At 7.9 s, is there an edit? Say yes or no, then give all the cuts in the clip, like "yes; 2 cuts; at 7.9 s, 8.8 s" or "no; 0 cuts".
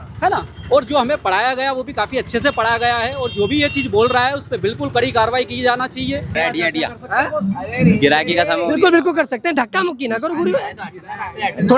no; 1 cut; at 6.3 s